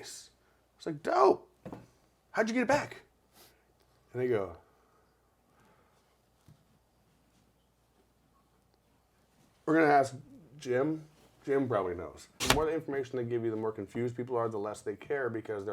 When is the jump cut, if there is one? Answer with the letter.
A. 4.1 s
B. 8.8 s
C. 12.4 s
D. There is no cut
C